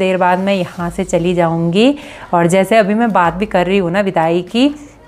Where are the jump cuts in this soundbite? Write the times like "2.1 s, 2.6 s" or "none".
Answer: none